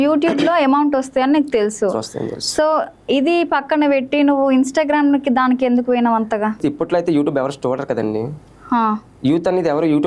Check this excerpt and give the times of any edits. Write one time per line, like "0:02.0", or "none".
0:06.6